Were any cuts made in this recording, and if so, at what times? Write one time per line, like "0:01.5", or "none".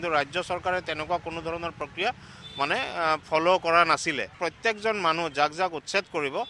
0:04.4